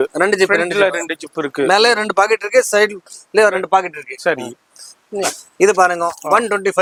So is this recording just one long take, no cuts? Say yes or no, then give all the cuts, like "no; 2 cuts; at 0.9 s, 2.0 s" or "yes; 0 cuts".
yes; 0 cuts